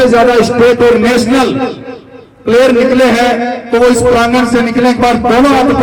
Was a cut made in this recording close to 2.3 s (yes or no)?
no